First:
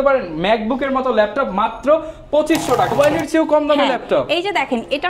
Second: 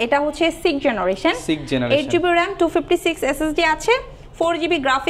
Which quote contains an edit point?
first; 1 cut; at 2.9 s

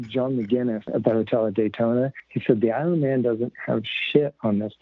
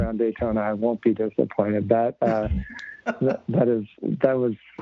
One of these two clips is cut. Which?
first; 2 cuts; at 0.9 s, 2.2 s

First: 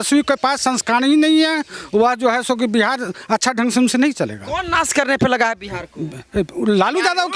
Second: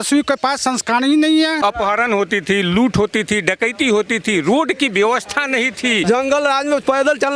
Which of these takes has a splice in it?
second; 2 cuts; at 1.6 s, 6.0 s

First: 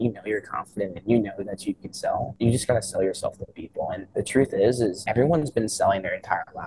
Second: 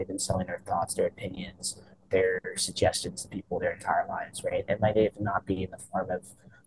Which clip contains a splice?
first; 3 cuts; at 2.3 s, 4.0 s, 5.0 s

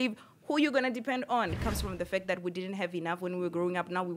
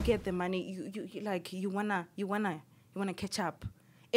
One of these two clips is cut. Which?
first; 1 cut; at 1.6 s

